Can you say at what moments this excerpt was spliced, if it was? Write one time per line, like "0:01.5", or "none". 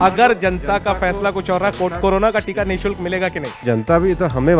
0:03.6